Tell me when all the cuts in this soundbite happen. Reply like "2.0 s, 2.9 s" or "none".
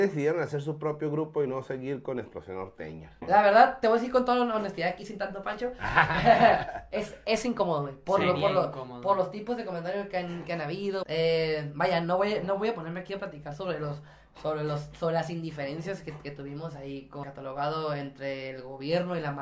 3.2 s, 11.0 s, 17.2 s